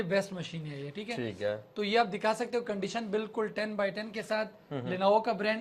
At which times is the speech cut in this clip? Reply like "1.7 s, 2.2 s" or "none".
none